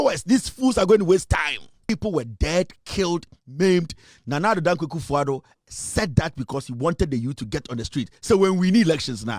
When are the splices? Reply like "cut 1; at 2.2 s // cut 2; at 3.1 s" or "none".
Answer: cut 1; at 1.9 s